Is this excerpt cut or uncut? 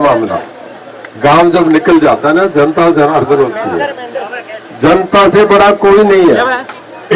uncut